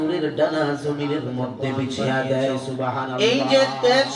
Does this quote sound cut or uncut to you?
cut